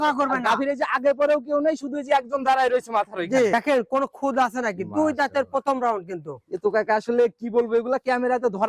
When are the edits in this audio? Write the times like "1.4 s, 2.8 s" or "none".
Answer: 3.5 s